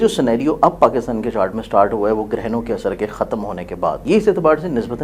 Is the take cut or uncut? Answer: cut